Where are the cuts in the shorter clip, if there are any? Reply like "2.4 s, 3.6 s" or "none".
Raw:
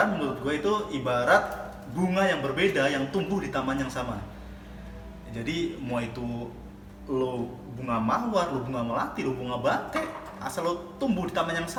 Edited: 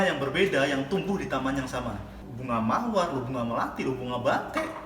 2.3 s